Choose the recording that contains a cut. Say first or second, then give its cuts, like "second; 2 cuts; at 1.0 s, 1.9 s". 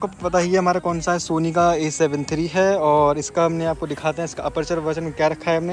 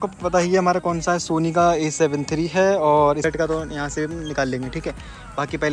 second; 1 cut; at 3.2 s